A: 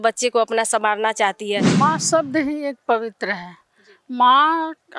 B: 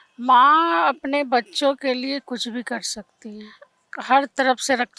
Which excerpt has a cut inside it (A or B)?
A